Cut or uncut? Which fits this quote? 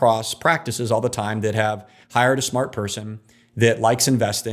uncut